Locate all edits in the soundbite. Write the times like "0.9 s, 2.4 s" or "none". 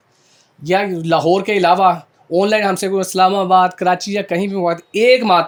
none